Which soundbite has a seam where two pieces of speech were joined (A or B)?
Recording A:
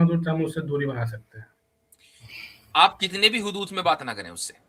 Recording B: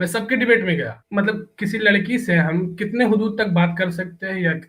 B